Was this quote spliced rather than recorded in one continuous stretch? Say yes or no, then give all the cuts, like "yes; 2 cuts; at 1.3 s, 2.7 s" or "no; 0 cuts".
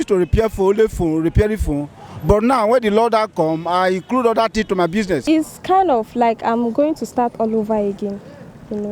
yes; 1 cut; at 5.2 s